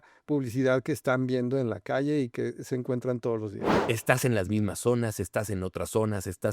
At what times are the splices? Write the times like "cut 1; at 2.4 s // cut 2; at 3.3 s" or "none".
cut 1; at 3.7 s

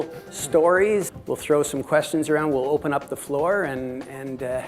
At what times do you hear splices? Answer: cut 1; at 1.1 s

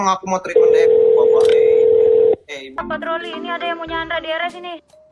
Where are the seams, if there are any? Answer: cut 1; at 2.8 s

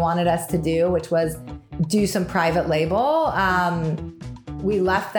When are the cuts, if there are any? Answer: cut 1; at 1.6 s // cut 2; at 4.5 s

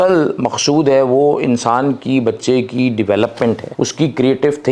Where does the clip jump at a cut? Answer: cut 1; at 3.7 s

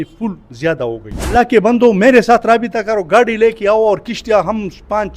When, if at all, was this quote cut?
cut 1; at 1.3 s

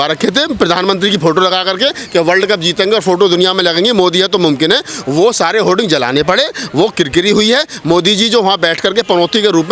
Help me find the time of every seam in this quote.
none

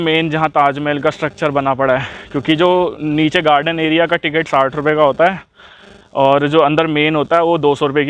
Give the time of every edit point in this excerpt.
none

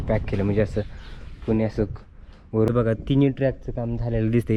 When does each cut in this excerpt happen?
cut 1; at 2.7 s

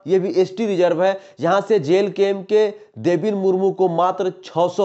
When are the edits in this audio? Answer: none

